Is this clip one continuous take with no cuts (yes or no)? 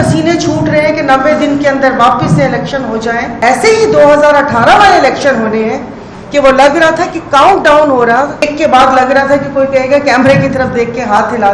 no